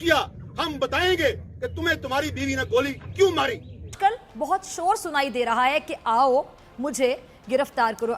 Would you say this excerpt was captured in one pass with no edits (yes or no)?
yes